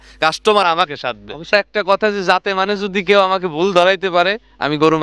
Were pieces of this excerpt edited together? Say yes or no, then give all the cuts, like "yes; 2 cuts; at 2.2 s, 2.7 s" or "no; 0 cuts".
yes; 1 cut; at 1.5 s